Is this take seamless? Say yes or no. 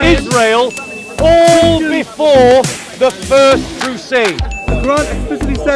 no